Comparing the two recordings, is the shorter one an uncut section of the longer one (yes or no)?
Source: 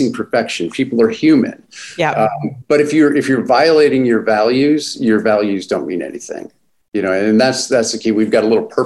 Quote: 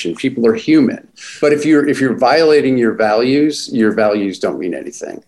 no